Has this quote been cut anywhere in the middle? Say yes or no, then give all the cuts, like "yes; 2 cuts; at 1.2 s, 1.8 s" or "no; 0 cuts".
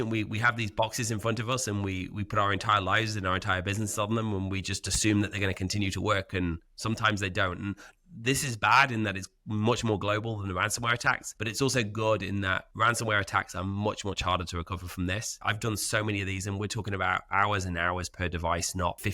yes; 2 cuts; at 7.9 s, 11.3 s